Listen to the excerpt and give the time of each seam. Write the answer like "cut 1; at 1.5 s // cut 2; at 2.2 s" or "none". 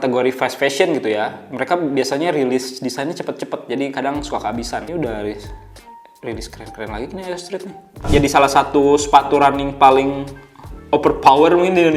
cut 1; at 4.9 s // cut 2; at 8.1 s

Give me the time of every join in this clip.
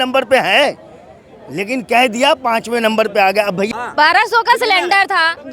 cut 1; at 3.7 s

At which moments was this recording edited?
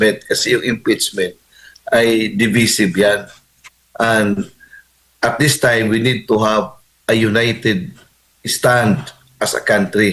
none

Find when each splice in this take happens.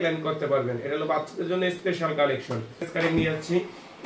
cut 1; at 2.8 s

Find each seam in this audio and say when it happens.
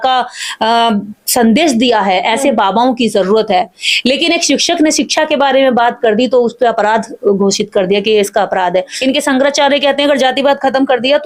cut 1; at 8.9 s

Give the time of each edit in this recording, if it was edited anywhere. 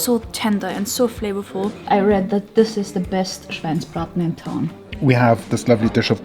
cut 1; at 1.9 s // cut 2; at 4.9 s

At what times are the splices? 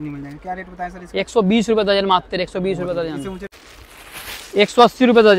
none

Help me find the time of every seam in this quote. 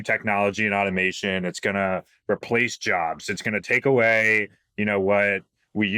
none

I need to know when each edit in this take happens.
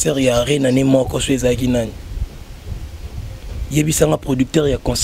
none

